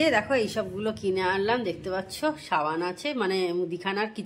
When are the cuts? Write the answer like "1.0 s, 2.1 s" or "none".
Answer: none